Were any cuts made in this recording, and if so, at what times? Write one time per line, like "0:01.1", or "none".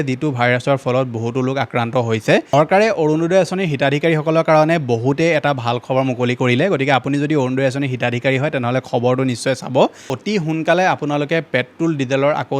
0:02.5
0:10.0